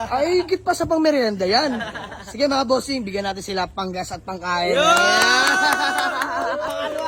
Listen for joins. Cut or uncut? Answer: uncut